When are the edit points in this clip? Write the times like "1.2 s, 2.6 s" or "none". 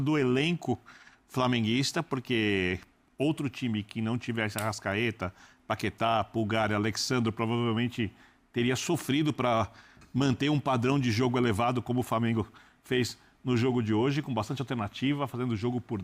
none

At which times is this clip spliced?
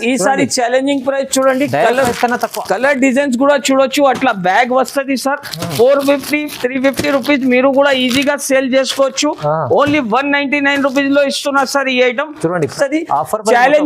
12.7 s

